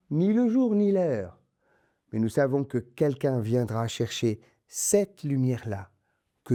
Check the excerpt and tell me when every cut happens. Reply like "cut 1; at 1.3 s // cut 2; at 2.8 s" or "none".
none